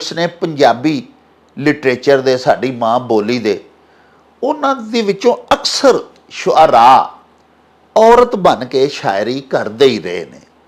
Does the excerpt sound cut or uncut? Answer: uncut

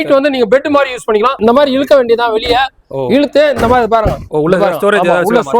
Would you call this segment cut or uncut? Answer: cut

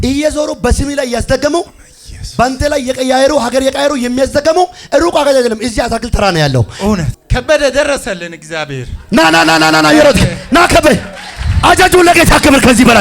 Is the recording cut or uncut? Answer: cut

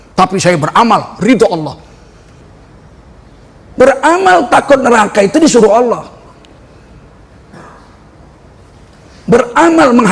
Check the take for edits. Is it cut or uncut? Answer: cut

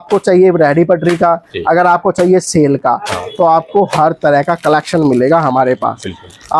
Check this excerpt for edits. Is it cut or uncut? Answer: uncut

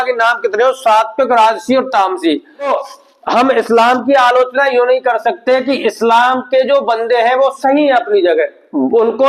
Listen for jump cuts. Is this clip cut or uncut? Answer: cut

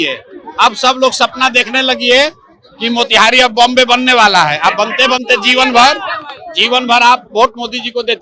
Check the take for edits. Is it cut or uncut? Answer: uncut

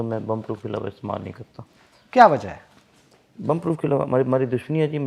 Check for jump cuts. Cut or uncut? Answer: uncut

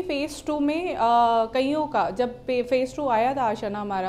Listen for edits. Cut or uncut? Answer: uncut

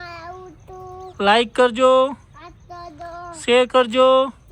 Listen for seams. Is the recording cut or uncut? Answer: uncut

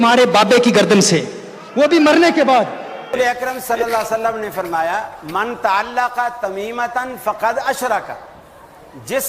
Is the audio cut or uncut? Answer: cut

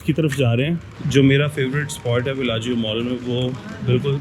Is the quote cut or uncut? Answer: cut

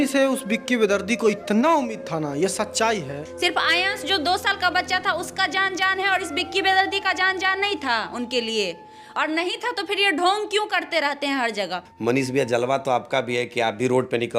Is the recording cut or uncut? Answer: cut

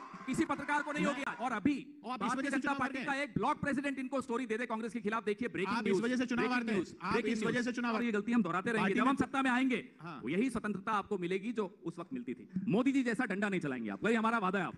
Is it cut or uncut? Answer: cut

